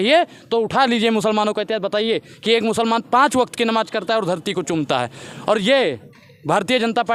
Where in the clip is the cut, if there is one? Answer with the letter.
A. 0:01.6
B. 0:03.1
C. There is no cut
C